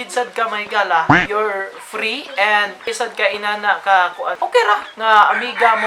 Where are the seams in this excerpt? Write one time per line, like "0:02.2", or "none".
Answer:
0:02.9
0:04.3